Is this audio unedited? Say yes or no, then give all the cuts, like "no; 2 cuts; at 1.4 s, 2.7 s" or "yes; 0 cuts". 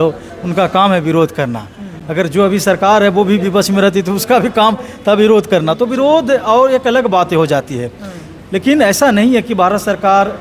yes; 0 cuts